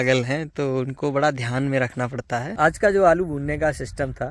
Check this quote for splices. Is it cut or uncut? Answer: cut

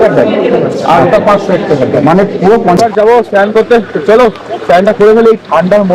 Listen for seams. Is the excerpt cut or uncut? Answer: cut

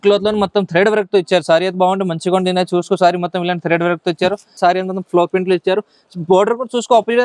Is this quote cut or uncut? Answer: cut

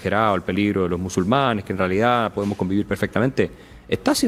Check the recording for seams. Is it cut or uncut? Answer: uncut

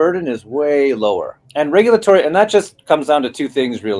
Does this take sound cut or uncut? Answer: cut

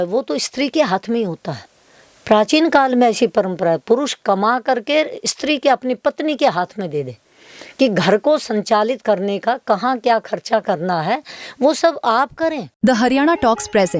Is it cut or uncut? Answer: cut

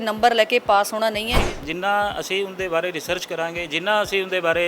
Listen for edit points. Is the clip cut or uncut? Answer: cut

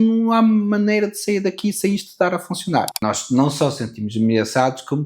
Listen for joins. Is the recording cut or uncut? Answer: cut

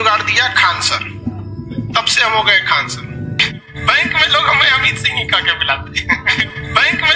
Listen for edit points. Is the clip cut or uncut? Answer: uncut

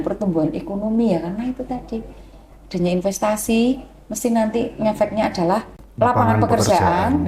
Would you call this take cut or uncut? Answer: cut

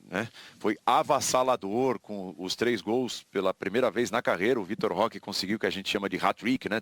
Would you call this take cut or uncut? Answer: uncut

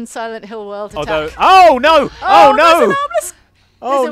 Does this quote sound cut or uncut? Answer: uncut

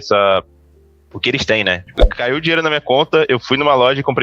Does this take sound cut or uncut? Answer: cut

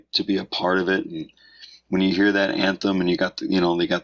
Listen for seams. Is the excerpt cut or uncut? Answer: uncut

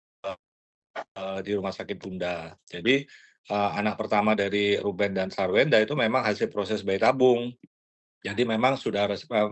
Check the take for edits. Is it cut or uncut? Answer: uncut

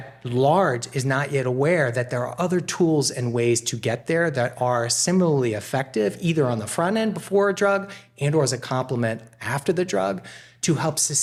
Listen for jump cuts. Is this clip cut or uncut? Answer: uncut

